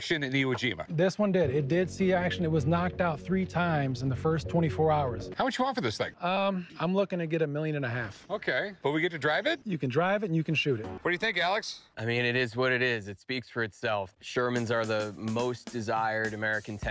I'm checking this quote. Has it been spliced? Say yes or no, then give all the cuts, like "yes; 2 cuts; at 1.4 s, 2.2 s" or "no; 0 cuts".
yes; 2 cuts; at 5.2 s, 11.0 s